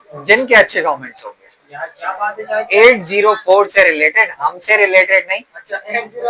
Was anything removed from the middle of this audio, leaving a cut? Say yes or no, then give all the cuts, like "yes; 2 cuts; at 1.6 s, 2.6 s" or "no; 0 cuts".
no; 0 cuts